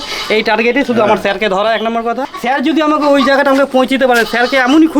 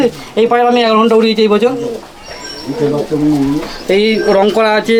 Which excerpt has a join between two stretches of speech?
first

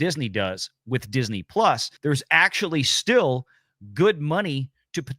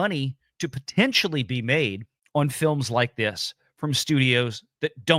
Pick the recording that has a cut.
first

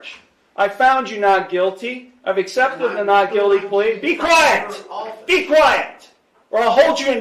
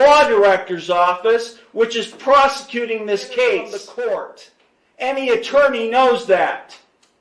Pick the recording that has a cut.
second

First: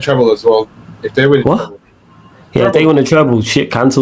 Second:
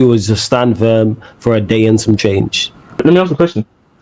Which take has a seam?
second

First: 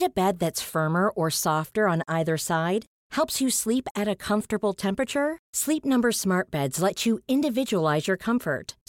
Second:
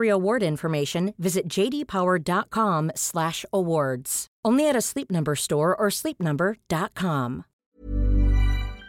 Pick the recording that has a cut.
second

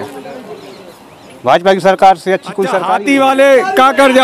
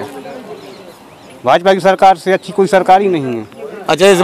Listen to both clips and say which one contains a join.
first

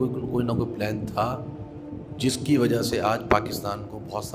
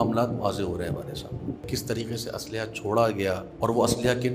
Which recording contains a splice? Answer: second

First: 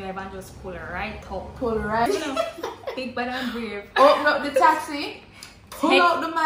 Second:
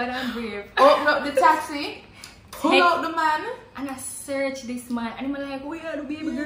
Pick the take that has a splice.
first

